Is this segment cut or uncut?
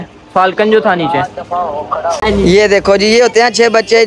cut